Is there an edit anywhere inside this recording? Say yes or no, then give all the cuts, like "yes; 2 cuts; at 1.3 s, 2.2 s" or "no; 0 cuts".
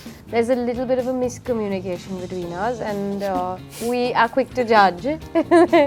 no; 0 cuts